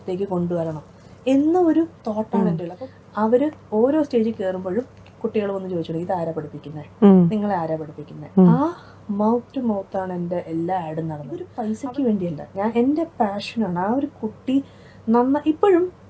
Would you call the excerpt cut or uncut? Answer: cut